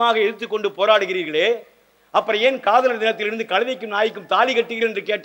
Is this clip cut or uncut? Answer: uncut